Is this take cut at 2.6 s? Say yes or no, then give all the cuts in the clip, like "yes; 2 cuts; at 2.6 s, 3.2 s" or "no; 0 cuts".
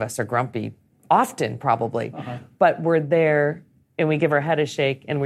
no; 0 cuts